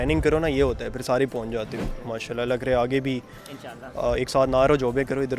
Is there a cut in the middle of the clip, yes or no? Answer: yes